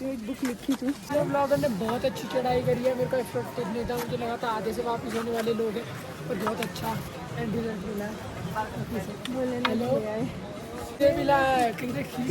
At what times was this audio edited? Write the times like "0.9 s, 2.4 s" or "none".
1.1 s, 11.0 s